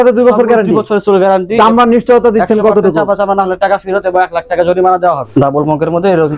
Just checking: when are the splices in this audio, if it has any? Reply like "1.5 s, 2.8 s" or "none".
1.6 s, 5.2 s